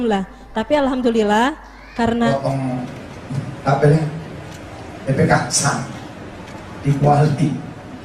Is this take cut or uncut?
cut